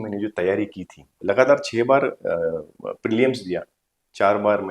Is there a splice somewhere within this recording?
yes; 1 cut; at 1.2 s

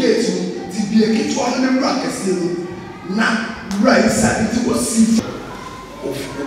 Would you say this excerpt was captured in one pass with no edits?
no; 1 cut; at 5.2 s

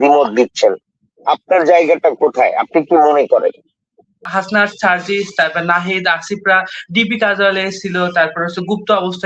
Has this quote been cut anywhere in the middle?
yes; 1 cut; at 4.2 s

